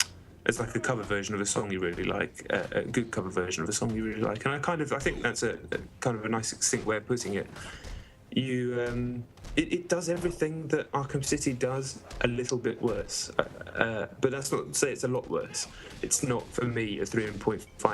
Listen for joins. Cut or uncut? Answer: cut